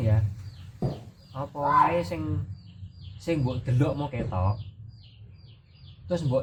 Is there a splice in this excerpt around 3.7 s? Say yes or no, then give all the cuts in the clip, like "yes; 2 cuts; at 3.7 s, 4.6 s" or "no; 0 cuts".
no; 0 cuts